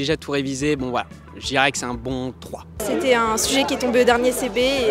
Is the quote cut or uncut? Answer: cut